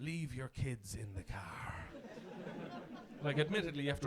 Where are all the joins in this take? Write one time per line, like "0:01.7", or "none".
0:02.4